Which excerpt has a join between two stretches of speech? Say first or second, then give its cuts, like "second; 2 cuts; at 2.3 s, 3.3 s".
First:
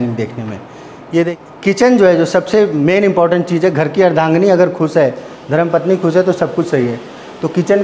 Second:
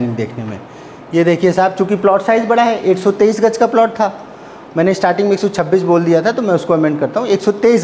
first; 1 cut; at 1.3 s